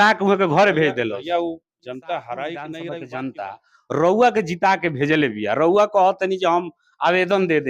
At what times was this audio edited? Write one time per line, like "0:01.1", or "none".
0:03.0